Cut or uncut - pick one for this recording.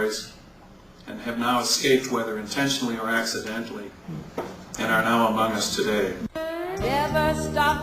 cut